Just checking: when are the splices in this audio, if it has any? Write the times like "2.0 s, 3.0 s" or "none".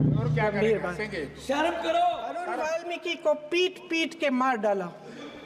2.5 s